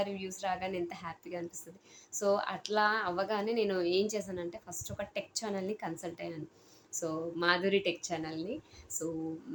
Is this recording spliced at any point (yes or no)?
no